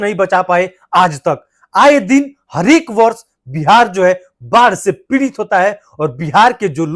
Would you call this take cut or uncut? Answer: uncut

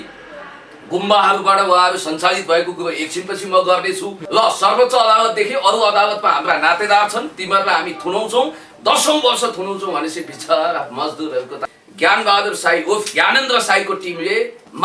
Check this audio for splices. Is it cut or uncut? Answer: cut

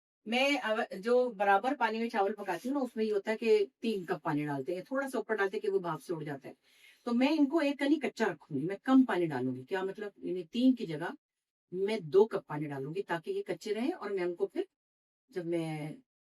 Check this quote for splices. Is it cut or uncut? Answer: uncut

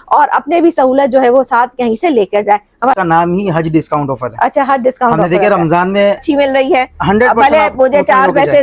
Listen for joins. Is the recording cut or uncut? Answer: cut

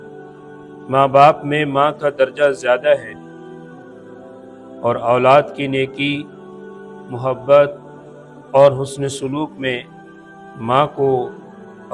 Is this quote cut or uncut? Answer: cut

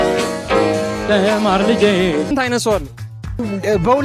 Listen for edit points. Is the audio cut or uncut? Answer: cut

